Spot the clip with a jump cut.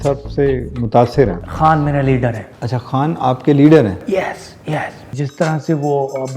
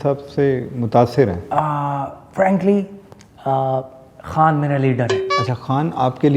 first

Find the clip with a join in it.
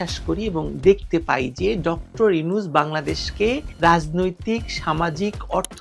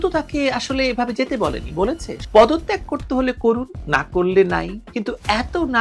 second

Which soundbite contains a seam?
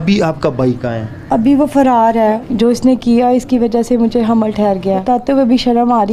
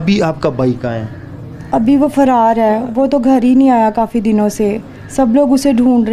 first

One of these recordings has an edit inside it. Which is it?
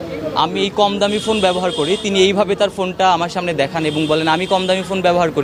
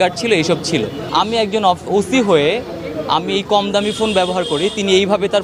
second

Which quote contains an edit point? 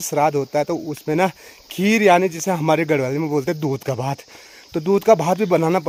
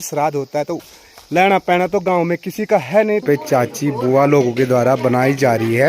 second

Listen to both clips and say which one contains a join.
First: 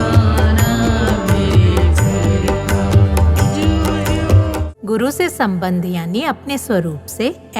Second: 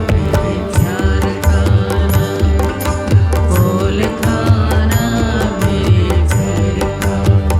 first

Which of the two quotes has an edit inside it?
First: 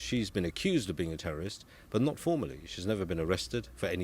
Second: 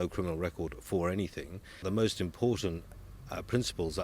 second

